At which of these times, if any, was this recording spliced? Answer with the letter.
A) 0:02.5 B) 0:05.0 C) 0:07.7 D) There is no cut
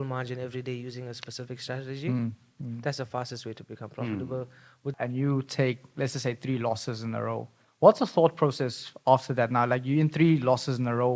B